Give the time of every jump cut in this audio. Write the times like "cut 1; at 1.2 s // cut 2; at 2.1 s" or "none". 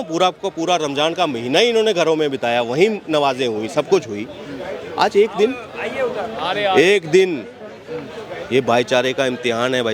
none